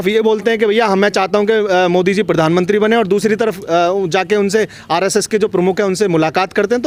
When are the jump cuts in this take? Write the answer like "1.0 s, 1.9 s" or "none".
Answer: none